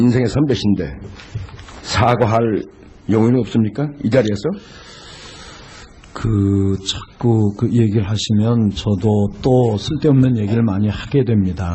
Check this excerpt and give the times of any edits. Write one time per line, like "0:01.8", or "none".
none